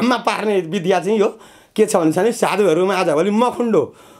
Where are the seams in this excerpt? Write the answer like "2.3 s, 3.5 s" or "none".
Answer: none